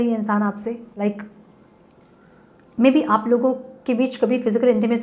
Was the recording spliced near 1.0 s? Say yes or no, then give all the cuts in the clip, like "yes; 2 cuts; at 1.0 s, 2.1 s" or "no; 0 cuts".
yes; 1 cut; at 1.0 s